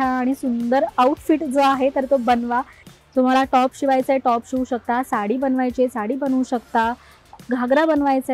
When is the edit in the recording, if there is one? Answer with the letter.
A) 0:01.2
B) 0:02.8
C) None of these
B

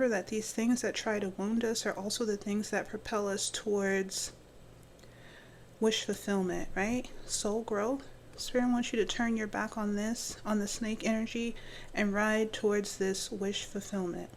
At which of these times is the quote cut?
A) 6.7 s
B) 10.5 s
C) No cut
C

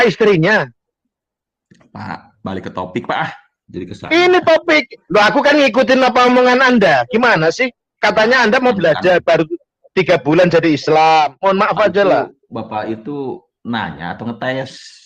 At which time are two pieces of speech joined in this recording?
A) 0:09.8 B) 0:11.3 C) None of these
B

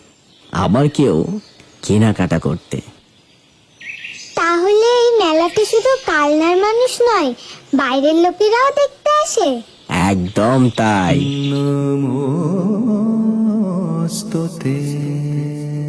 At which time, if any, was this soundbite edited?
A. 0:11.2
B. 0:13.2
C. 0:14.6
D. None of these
A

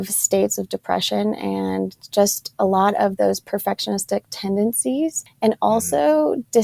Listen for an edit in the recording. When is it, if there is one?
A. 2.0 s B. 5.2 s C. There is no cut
B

